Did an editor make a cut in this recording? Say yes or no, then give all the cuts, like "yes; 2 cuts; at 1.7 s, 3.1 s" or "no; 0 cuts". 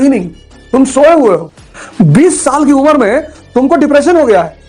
yes; 2 cuts; at 0.8 s, 1.5 s